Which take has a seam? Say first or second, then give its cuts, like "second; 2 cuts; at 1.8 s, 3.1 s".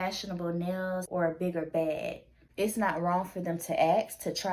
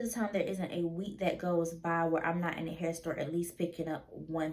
first; 2 cuts; at 1.1 s, 2.4 s